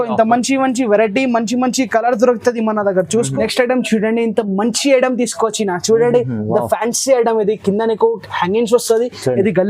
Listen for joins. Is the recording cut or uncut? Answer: cut